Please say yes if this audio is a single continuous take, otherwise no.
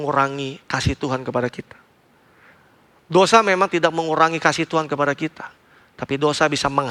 yes